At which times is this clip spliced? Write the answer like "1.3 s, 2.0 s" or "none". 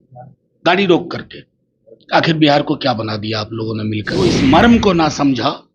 4.2 s